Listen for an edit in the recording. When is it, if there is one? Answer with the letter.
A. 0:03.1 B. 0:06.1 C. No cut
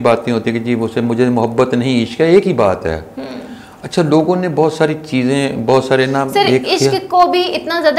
C